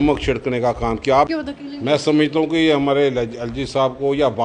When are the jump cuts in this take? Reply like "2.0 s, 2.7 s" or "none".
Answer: 1.3 s